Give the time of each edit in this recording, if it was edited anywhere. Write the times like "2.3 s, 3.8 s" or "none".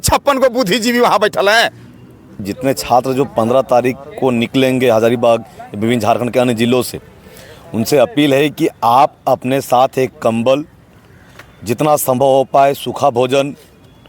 2.4 s